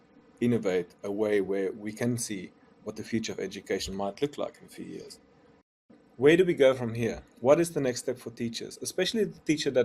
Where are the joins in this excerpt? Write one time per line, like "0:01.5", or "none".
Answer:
0:05.9